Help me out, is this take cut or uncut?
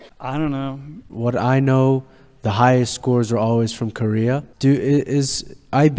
cut